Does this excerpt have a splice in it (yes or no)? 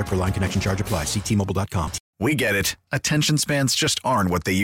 yes